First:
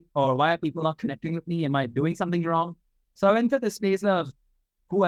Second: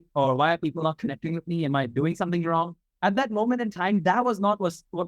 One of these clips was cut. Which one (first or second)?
second